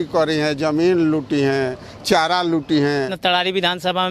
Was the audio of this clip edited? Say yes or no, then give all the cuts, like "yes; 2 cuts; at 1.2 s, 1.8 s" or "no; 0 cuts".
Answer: yes; 1 cut; at 3.1 s